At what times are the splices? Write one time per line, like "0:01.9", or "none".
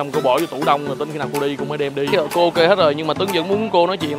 0:02.1